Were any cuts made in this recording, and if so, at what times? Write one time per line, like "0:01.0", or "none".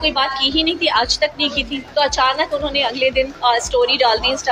0:01.8
0:03.3